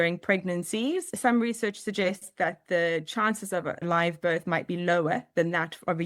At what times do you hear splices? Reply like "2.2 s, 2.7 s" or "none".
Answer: 1.1 s, 3.9 s